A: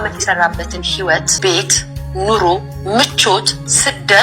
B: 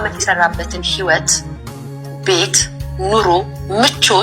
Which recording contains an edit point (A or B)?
A